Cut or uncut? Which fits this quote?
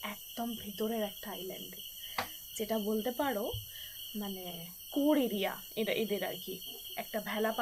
uncut